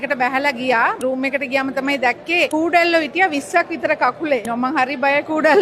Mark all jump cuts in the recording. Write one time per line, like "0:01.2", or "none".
0:01.0
0:02.5
0:04.5